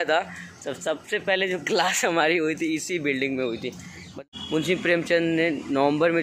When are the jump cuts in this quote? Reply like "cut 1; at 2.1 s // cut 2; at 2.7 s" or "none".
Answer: cut 1; at 4.1 s